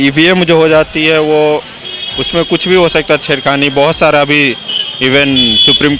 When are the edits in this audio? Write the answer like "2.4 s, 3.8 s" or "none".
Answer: none